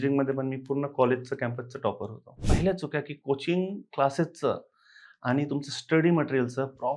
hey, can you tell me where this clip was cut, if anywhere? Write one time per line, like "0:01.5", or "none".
0:02.5